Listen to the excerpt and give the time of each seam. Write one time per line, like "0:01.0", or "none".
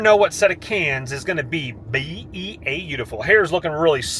none

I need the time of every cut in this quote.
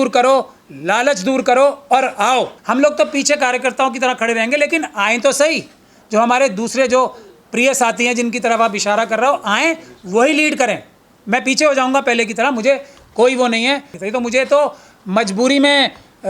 0:02.6

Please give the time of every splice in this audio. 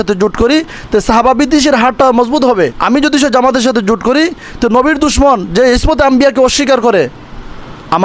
0:02.8

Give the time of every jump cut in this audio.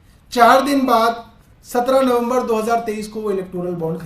none

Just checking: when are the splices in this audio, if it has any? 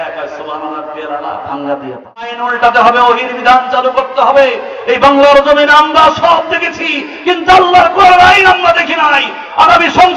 0:02.4

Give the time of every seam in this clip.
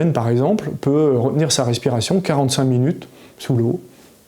none

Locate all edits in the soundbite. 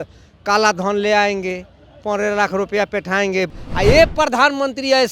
0:03.5

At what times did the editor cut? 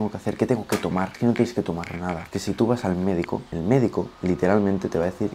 0:01.1
0:02.3
0:03.5
0:04.1

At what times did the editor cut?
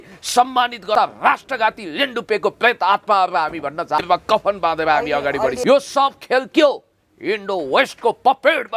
0:00.9
0:04.0
0:05.6

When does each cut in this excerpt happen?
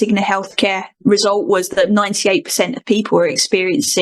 0:00.9

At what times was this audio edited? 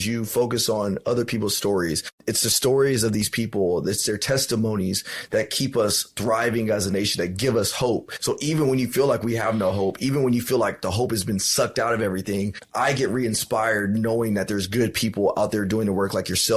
0:02.1
0:08.1
0:12.6

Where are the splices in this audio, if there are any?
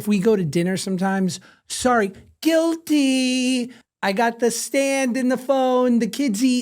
0:03.8

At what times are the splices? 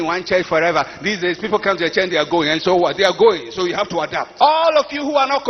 0:04.2

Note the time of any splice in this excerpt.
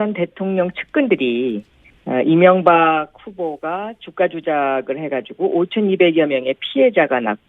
0:03.5

